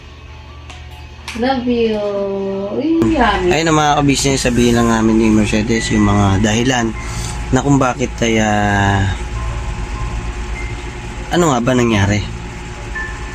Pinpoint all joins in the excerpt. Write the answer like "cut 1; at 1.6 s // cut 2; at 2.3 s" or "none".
cut 1; at 3.5 s